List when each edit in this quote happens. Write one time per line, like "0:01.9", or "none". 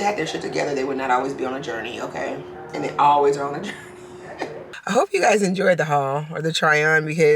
0:04.7

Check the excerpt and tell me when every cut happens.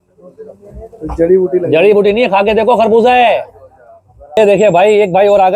0:04.4

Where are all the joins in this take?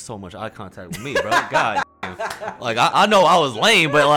none

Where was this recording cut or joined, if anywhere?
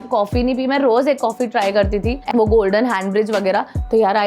0:02.2

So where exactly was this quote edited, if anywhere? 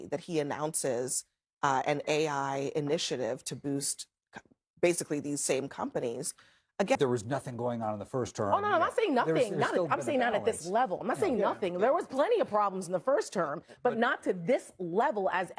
0:07.0

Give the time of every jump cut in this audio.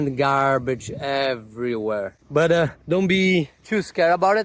none

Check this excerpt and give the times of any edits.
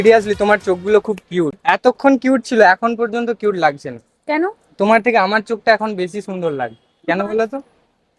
0:01.6

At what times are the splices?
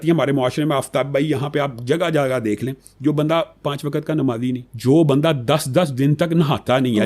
0:04.7

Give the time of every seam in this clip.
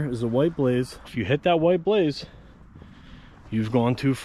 0:01.1

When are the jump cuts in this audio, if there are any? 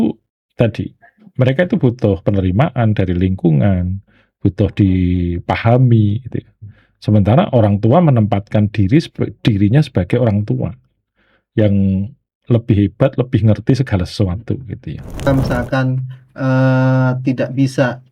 0:15.3

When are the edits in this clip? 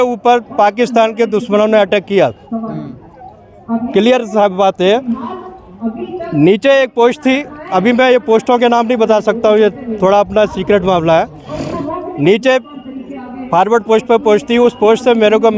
none

